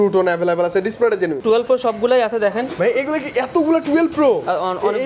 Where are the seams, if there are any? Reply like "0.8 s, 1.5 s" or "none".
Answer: 1.4 s

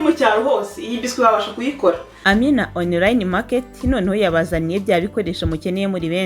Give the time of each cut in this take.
2.1 s

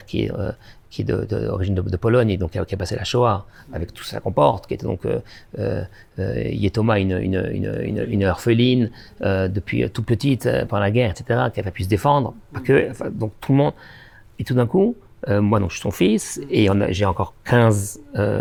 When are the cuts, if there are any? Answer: none

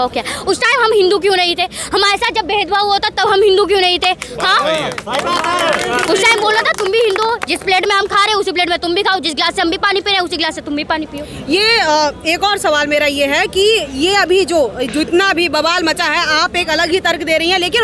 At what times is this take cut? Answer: none

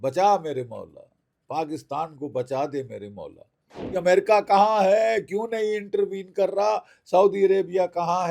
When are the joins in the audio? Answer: 3.9 s

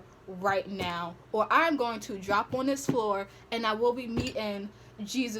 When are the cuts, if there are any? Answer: none

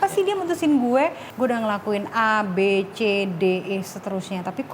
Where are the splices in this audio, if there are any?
1.2 s

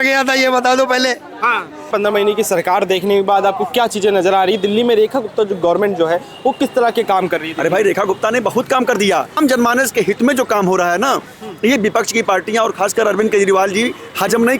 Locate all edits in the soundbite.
1.8 s, 9.4 s

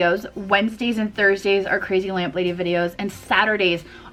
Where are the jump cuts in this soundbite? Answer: none

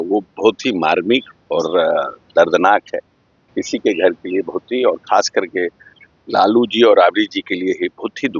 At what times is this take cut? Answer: 3.4 s

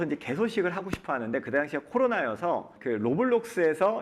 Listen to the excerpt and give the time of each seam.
2.7 s

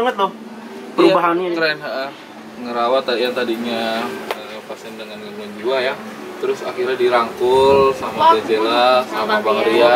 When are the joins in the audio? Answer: none

